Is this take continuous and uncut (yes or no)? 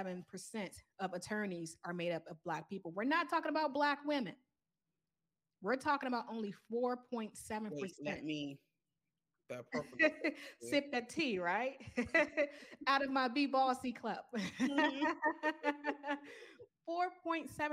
yes